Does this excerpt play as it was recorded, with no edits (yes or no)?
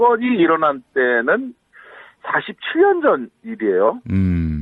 no